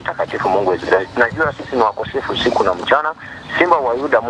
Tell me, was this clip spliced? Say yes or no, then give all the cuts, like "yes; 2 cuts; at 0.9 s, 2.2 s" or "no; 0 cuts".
no; 0 cuts